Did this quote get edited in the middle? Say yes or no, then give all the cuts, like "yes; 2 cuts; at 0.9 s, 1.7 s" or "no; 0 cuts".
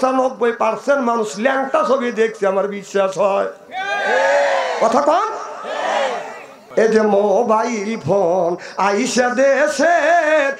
yes; 1 cut; at 6.6 s